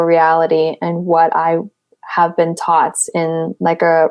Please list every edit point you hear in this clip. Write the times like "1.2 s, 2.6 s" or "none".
none